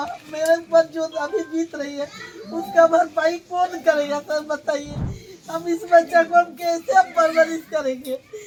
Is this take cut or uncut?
uncut